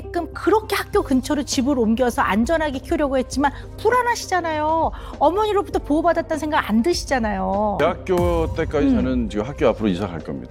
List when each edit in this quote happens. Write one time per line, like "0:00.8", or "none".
0:07.8